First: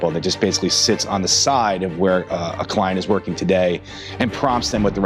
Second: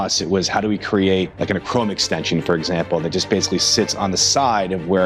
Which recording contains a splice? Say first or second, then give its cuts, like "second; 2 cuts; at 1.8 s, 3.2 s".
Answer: second; 1 cut; at 1.3 s